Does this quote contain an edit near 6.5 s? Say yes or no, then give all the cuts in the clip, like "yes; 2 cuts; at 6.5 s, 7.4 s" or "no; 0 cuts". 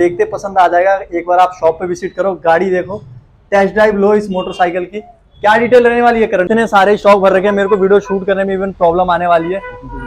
yes; 1 cut; at 6.5 s